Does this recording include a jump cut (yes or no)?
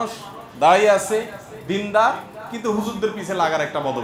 no